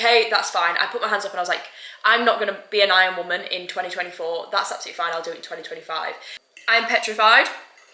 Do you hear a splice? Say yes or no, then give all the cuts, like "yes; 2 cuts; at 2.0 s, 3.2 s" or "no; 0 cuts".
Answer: yes; 1 cut; at 6.3 s